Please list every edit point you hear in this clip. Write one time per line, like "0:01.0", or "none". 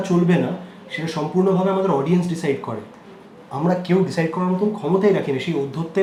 none